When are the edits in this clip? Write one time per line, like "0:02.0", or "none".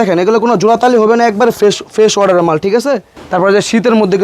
0:03.1